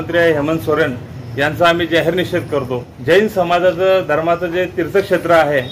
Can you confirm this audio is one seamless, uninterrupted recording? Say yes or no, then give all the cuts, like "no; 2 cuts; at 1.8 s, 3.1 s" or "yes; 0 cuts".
no; 1 cut; at 2.9 s